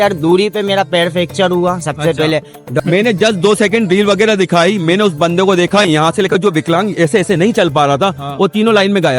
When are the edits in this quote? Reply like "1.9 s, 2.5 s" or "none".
2.8 s